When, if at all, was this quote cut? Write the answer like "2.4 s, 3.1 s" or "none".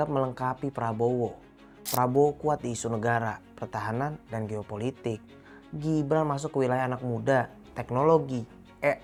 none